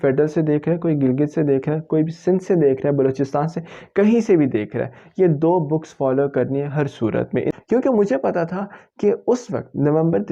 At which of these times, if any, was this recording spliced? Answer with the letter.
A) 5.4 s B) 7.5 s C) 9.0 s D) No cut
B